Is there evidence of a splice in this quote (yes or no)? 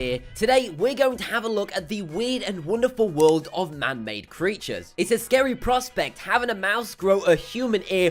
no